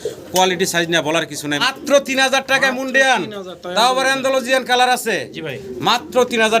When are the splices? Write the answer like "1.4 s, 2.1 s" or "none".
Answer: 1.6 s